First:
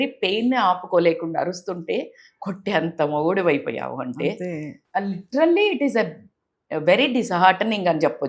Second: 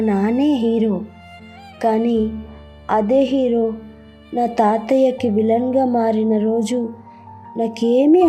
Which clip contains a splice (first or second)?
first